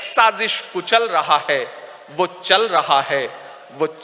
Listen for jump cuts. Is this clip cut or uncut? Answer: uncut